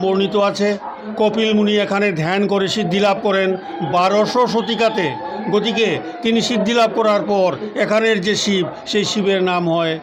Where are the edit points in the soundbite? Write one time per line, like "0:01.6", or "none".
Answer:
none